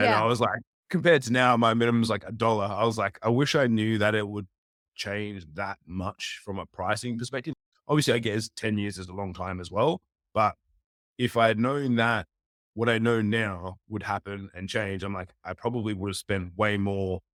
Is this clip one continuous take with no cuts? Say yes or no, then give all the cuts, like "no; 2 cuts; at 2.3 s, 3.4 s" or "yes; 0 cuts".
yes; 0 cuts